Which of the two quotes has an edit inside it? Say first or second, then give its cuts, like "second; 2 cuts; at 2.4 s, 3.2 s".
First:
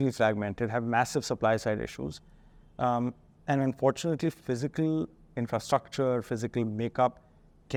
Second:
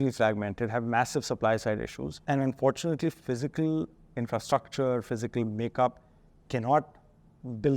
second; 1 cut; at 2.1 s